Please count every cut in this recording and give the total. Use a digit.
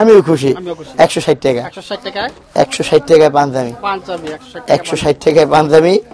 0